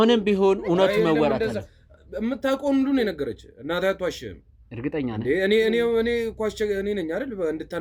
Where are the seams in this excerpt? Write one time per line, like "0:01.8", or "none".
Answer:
none

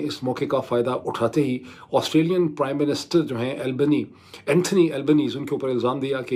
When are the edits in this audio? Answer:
none

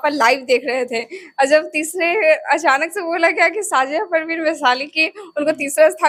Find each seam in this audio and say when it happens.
none

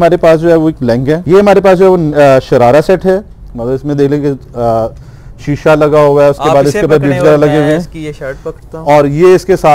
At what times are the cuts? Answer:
0:01.2

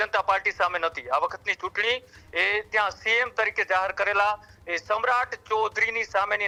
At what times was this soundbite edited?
none

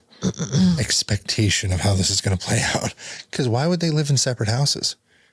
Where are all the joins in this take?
none

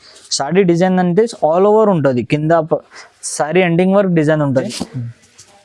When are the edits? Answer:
0:04.6

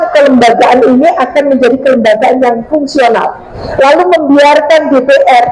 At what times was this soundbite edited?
0:03.6

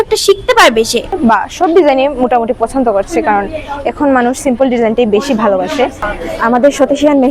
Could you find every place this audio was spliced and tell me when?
0:01.2
0:06.1

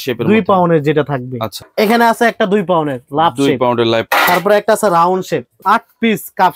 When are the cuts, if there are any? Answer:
0:01.6
0:04.1
0:05.5

